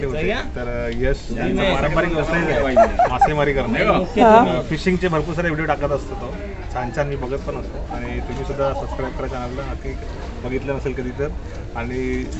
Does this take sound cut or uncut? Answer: uncut